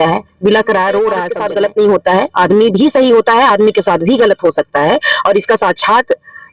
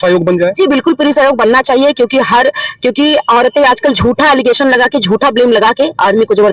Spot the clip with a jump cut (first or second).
first